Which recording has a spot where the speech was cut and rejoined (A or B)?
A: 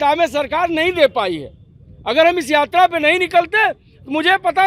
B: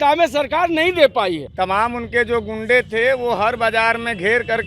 B